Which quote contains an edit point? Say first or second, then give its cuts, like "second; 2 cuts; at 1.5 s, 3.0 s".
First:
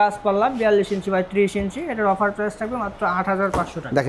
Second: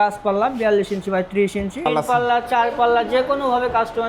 second; 1 cut; at 1.9 s